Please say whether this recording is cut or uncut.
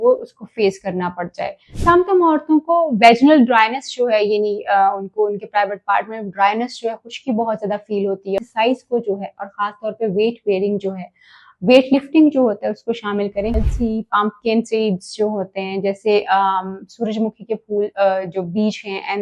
cut